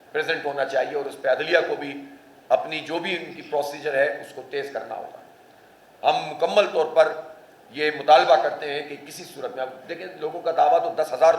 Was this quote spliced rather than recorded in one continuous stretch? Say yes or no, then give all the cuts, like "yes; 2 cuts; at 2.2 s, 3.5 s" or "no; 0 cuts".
no; 0 cuts